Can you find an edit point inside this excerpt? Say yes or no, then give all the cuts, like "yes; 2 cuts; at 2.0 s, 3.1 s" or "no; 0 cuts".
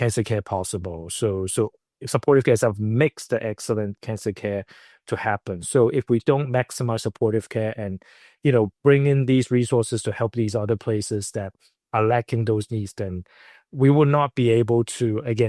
no; 0 cuts